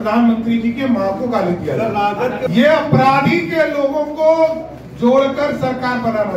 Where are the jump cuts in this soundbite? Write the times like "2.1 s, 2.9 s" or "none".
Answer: 2.5 s

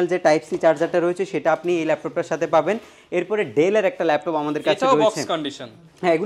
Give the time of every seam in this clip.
none

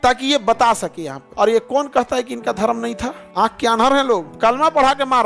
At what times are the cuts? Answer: 1.2 s, 3.2 s, 4.3 s

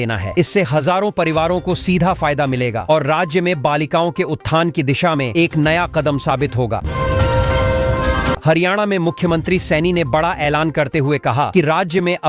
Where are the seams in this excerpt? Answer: 6.9 s, 8.4 s

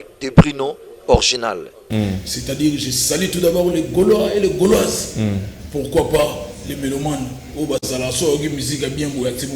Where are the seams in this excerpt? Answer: 1.8 s

